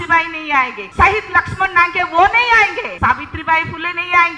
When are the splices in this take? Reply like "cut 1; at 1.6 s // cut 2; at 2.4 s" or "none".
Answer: cut 1; at 0.8 s // cut 2; at 2.8 s